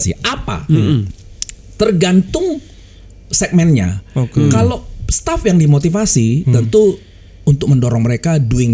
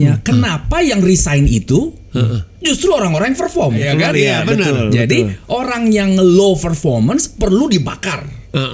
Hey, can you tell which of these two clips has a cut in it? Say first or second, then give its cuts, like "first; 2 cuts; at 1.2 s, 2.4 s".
second; 1 cut; at 3.8 s